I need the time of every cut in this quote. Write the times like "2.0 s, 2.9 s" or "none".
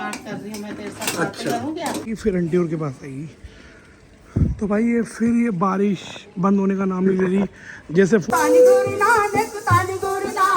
2.1 s, 8.2 s